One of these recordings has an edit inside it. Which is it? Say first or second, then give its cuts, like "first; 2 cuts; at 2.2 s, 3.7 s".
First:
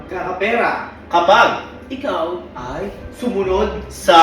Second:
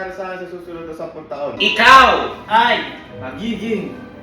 second; 1 cut; at 1.6 s